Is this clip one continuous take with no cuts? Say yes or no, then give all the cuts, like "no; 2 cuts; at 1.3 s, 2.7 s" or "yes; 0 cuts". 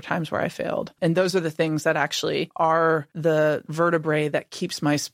no; 3 cuts; at 1.0 s, 2.5 s, 3.1 s